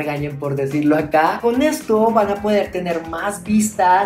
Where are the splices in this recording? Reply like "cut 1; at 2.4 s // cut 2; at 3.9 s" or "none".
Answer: cut 1; at 1.4 s